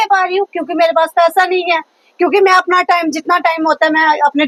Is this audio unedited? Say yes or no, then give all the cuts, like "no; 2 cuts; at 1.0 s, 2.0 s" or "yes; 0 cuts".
yes; 0 cuts